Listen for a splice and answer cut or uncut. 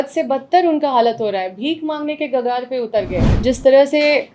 cut